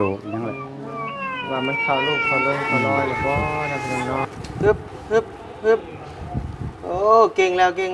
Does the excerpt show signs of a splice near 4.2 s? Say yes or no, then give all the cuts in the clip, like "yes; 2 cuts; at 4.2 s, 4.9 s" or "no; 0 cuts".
yes; 1 cut; at 4.2 s